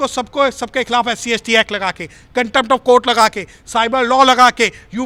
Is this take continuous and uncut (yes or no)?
yes